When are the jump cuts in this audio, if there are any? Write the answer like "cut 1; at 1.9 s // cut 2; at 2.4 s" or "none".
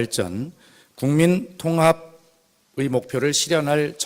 cut 1; at 1.5 s